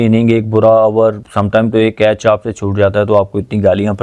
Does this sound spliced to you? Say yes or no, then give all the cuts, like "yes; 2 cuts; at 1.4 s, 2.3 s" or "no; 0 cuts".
yes; 1 cut; at 1.3 s